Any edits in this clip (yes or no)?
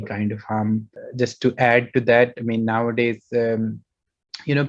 no